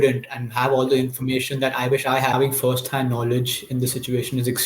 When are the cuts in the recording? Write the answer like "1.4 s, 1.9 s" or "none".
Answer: 2.3 s